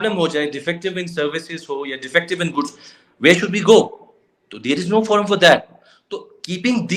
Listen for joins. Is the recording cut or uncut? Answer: uncut